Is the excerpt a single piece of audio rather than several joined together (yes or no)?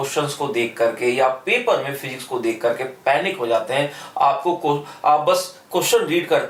yes